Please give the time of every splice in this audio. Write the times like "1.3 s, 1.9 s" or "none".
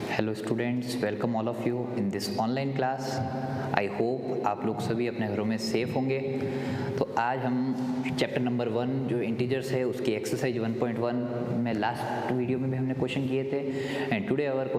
1.3 s